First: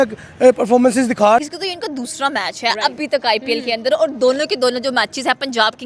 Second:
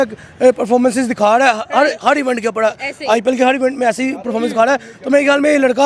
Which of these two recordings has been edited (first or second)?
first